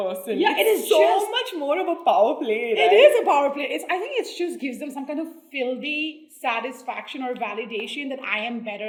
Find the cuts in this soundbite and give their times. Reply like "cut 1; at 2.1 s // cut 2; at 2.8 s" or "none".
none